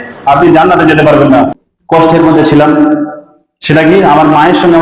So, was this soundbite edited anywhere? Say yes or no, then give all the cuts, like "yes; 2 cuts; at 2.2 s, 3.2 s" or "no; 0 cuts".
yes; 1 cut; at 1.6 s